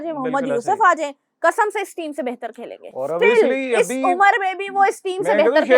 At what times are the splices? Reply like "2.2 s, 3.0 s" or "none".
none

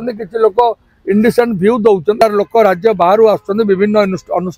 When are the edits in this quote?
2.2 s

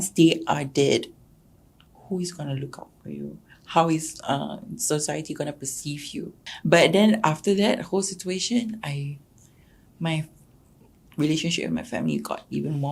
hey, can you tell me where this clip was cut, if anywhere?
6.4 s

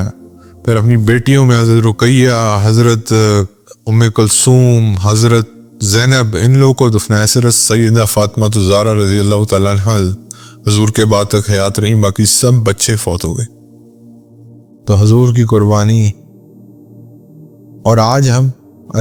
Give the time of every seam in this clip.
none

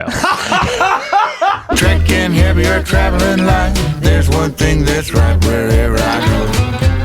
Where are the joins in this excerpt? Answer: 1.7 s

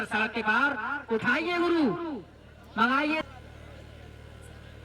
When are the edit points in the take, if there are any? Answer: 3.2 s

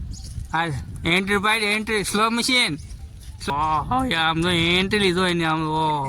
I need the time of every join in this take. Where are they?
3.4 s

